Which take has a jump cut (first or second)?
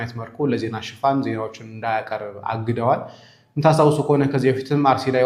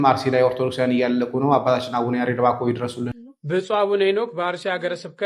second